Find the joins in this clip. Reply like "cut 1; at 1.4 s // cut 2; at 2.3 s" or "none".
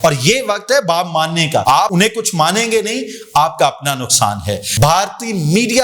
cut 1; at 1.8 s // cut 2; at 4.6 s